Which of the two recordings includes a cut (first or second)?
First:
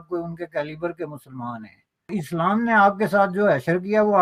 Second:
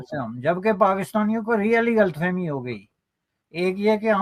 first